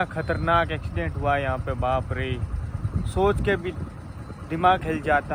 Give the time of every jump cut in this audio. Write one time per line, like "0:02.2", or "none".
none